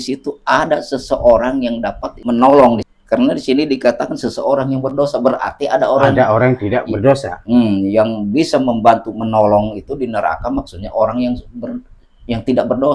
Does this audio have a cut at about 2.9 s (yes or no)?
yes